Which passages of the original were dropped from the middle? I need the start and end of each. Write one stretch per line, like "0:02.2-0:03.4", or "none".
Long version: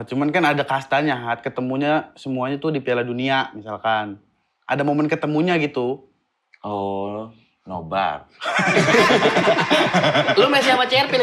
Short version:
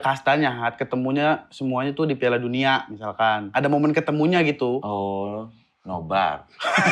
0:04.1-0:04.6
0:06.0-0:06.6